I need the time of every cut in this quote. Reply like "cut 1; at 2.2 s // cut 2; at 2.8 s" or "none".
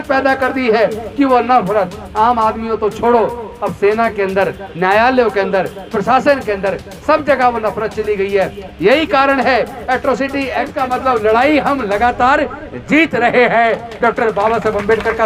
cut 1; at 10.7 s

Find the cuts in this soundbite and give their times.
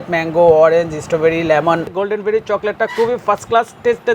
cut 1; at 1.9 s

